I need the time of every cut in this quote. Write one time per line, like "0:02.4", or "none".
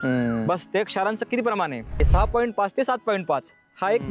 0:02.1